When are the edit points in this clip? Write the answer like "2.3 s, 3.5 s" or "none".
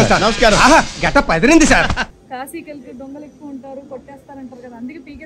2.2 s